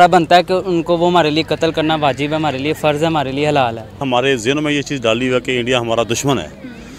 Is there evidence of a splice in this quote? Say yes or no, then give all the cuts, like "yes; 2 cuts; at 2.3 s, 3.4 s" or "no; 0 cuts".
yes; 1 cut; at 4.0 s